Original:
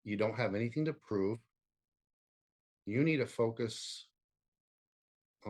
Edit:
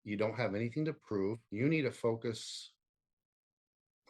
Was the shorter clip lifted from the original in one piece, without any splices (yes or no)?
no